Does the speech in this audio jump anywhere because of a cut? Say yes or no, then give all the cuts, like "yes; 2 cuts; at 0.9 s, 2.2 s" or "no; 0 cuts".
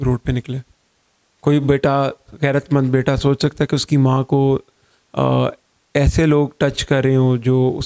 no; 0 cuts